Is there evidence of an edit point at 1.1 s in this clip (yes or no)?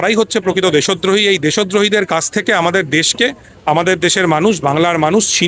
no